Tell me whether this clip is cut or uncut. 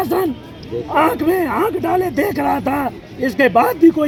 uncut